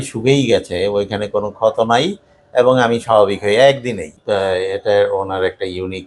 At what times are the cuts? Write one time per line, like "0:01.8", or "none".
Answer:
0:04.1